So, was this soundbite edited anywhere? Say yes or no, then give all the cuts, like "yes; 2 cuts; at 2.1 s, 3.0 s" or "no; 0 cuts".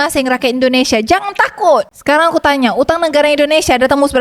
yes; 1 cut; at 1.9 s